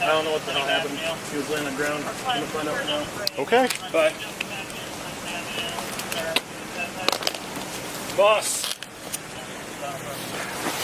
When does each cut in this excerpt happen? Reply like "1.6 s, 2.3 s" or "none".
none